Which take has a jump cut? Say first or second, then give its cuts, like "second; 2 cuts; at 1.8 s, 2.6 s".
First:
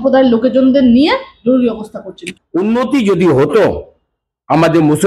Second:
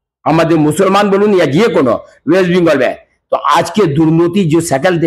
first; 1 cut; at 2.3 s